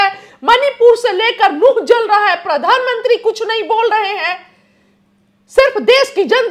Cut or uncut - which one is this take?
uncut